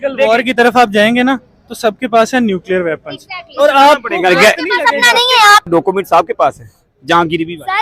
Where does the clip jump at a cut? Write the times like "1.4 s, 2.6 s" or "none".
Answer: 5.7 s